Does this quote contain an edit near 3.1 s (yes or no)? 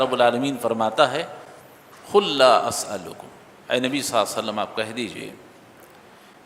no